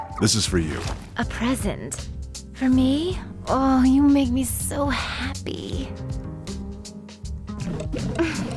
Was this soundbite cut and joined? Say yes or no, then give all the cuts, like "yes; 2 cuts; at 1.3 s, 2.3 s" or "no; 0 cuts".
yes; 1 cut; at 1.0 s